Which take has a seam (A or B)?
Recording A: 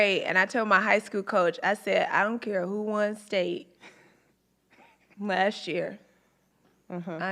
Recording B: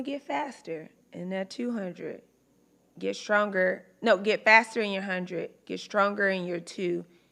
A